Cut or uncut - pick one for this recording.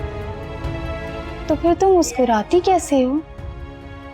cut